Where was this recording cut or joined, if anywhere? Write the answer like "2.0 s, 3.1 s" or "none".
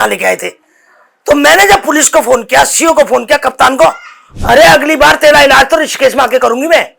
4.3 s